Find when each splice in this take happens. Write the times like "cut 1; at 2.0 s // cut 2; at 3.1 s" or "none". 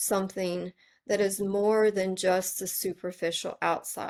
none